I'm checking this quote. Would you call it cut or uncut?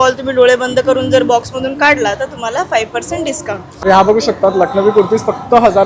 cut